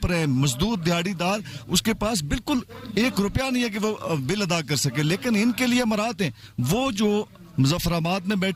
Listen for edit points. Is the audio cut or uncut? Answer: uncut